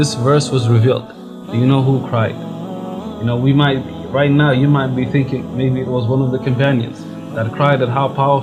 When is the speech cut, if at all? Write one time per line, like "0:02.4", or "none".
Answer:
none